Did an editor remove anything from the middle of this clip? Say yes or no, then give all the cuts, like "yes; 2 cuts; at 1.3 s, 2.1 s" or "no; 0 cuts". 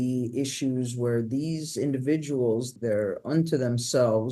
yes; 1 cut; at 2.7 s